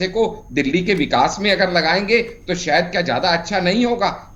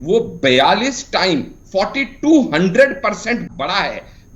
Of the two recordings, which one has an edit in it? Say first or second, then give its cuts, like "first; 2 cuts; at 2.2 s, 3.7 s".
second; 1 cut; at 3.4 s